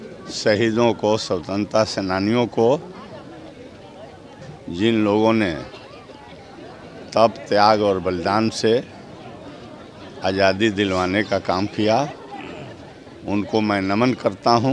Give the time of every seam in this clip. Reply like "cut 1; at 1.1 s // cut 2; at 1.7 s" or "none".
none

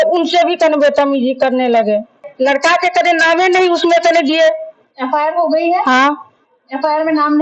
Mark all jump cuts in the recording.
cut 1; at 2.3 s

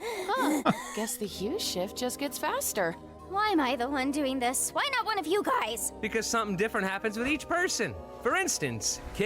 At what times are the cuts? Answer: cut 1; at 4.1 s

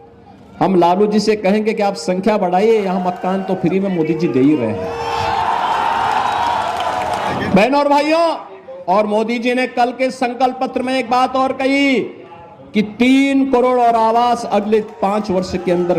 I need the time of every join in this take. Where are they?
cut 1; at 7.3 s

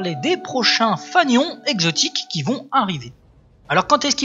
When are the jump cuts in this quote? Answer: none

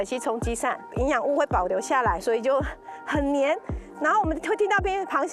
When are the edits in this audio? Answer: cut 1; at 0.9 s

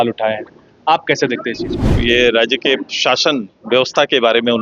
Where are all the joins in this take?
cut 1; at 1.9 s

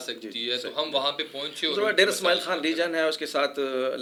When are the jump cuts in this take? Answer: none

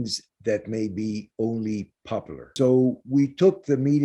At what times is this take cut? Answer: cut 1; at 2.5 s

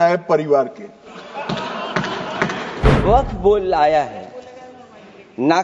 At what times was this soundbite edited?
cut 1; at 2.8 s

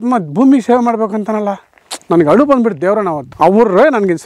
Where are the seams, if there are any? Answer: cut 1; at 3.2 s

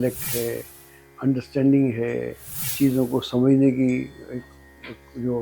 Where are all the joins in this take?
none

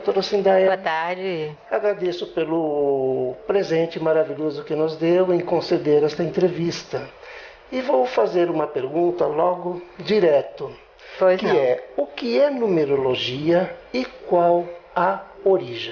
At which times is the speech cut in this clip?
cut 1; at 9.6 s

